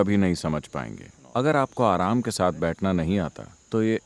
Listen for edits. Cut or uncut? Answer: cut